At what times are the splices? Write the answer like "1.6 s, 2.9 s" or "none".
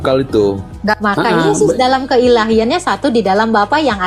0.9 s